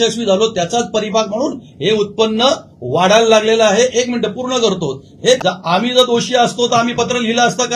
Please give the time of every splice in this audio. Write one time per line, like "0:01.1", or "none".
0:05.4